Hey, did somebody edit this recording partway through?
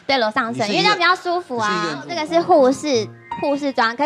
yes; 1 cut; at 2.0 s

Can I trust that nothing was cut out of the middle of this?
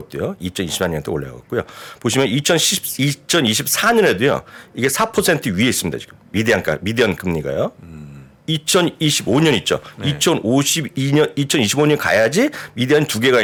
yes; 0 cuts

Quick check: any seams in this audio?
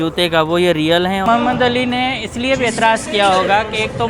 yes; 1 cut; at 1.2 s

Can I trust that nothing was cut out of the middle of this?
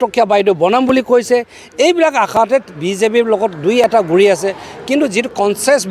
yes; 0 cuts

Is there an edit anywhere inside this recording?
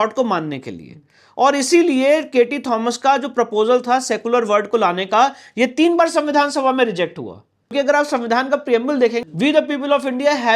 yes; 2 cuts; at 7.7 s, 9.2 s

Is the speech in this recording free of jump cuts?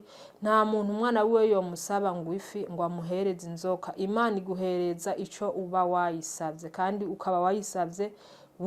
yes; 0 cuts

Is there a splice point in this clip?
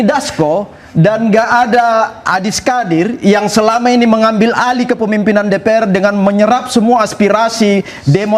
no; 0 cuts

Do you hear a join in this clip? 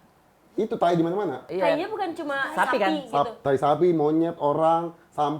yes; 1 cut; at 1.4 s

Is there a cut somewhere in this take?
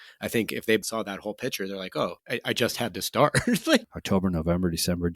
yes; 3 cuts; at 0.8 s, 2.2 s, 3.9 s

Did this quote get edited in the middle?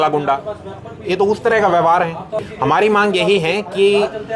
no; 0 cuts

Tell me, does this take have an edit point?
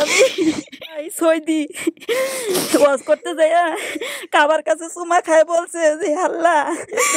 yes; 1 cut; at 1.1 s

